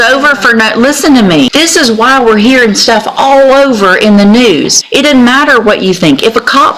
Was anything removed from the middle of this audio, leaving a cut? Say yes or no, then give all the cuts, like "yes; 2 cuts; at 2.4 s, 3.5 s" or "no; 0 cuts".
yes; 2 cuts; at 1.5 s, 4.8 s